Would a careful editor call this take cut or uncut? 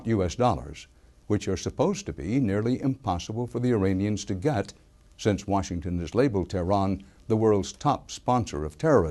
uncut